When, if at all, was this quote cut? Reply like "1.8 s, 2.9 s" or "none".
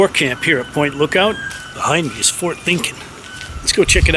1.5 s